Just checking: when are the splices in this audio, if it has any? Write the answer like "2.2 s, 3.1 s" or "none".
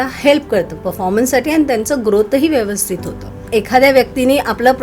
3.4 s